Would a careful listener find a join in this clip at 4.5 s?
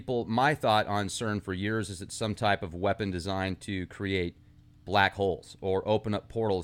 yes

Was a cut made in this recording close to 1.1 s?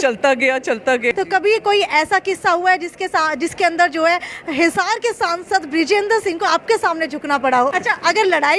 yes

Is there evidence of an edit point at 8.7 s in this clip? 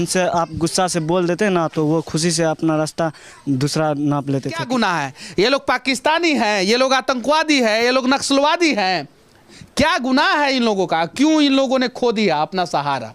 no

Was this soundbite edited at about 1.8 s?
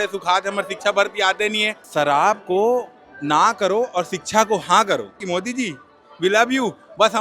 yes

